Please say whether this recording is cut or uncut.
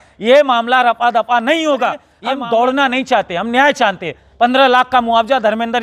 cut